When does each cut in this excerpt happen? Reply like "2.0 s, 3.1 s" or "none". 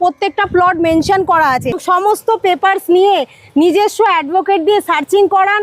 1.8 s